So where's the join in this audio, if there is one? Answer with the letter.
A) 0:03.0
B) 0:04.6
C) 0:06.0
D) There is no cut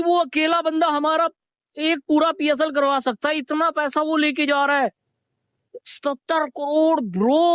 D